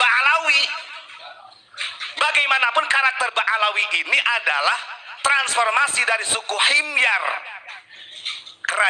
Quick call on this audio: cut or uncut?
uncut